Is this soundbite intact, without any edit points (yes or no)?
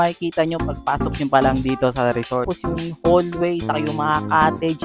no